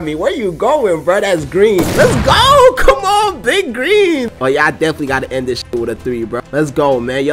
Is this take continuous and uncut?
no; 1 cut; at 4.3 s

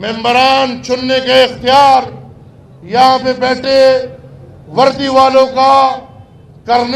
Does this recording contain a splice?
no; 0 cuts

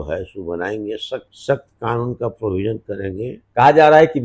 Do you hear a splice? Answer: yes; 2 cuts; at 1.3 s, 3.3 s

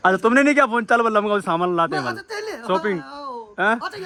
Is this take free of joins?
yes; 0 cuts

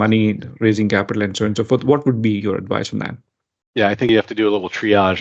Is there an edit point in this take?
no; 0 cuts

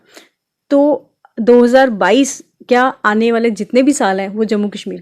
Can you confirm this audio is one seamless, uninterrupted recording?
yes; 0 cuts

